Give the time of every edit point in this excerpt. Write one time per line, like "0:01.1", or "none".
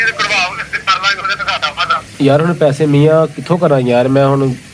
0:02.1